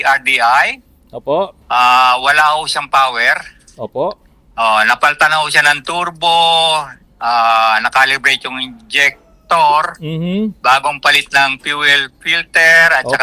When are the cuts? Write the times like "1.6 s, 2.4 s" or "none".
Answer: none